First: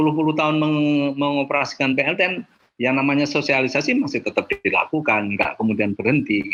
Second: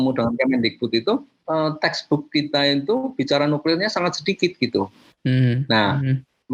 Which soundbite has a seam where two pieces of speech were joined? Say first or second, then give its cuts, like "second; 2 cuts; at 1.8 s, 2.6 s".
second; 1 cut; at 1.3 s